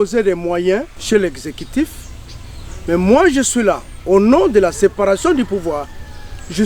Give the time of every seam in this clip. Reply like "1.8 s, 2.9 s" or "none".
1.0 s